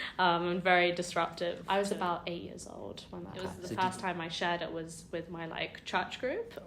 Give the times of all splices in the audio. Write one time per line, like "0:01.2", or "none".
0:01.6
0:03.6